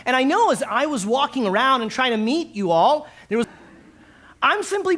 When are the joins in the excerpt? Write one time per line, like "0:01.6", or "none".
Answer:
0:03.5